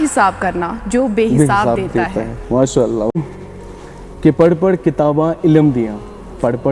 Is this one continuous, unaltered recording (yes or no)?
no